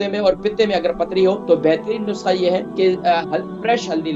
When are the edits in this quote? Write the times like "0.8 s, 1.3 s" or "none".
1.4 s, 2.7 s